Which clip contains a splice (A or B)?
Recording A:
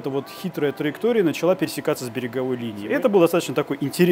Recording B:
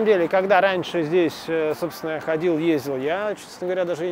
A